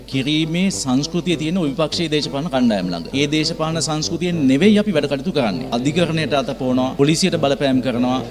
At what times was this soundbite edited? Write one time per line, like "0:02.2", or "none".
none